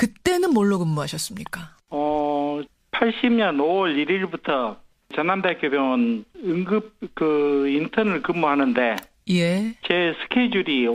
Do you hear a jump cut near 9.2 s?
no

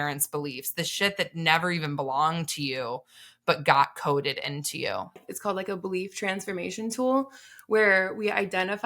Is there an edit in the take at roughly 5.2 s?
yes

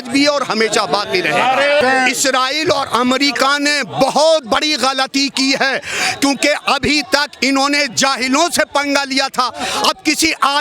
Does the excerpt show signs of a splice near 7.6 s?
no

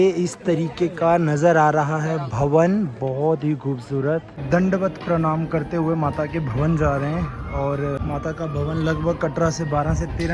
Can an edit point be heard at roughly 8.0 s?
yes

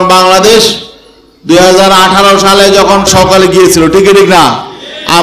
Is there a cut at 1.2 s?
no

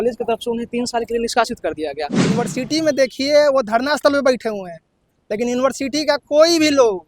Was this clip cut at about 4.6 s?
no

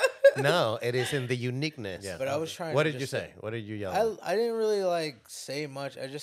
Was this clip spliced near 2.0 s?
yes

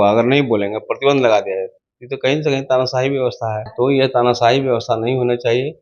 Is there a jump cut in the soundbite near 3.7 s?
yes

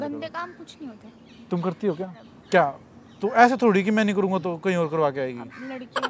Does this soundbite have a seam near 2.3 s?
yes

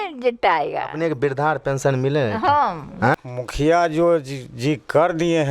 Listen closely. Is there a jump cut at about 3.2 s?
yes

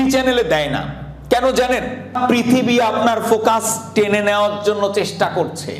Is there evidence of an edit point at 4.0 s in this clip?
no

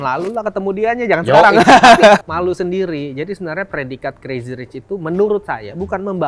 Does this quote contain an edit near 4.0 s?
no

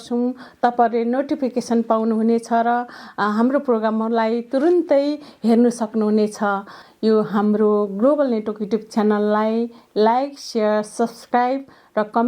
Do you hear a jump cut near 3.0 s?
no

